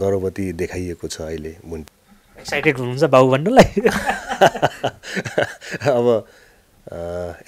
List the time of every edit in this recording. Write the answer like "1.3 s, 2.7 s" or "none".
1.8 s